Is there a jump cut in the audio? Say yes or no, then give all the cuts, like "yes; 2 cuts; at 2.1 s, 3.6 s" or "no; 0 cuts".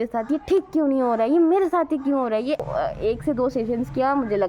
yes; 1 cut; at 2.6 s